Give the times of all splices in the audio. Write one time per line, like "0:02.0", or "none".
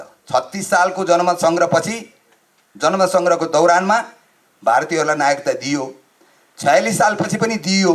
none